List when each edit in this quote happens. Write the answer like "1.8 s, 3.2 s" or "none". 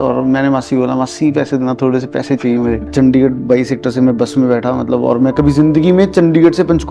2.8 s